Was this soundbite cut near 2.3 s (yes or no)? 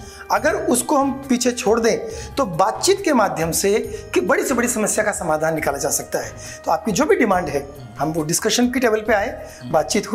no